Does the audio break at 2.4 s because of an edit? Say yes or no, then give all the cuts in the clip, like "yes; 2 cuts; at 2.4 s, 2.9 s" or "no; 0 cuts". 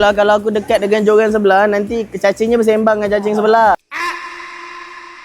no; 1 cut; at 3.8 s